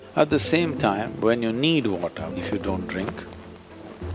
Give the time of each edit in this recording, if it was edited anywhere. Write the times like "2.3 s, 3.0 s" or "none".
2.3 s

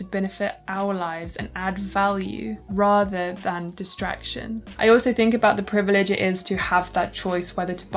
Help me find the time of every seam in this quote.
4.7 s

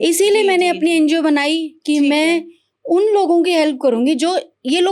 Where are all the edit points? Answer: none

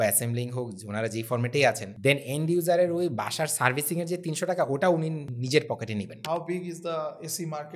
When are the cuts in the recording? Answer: 1.9 s, 5.3 s, 6.2 s

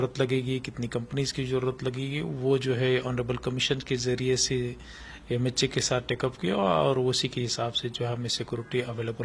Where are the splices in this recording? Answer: none

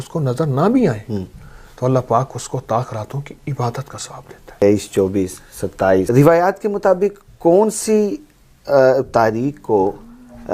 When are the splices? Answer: 4.6 s, 6.1 s

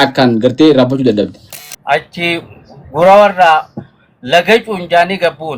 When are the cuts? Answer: 1.4 s

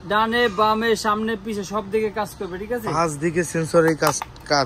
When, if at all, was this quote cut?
none

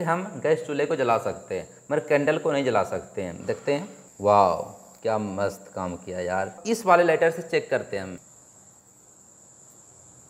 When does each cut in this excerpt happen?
4.0 s, 6.6 s

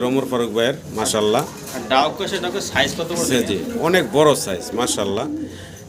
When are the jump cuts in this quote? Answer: none

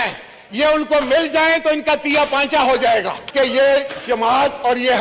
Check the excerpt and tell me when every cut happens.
3.2 s

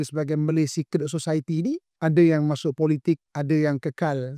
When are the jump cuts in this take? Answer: 1.9 s, 3.3 s

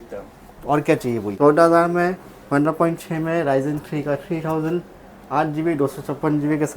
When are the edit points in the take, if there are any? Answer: 1.3 s

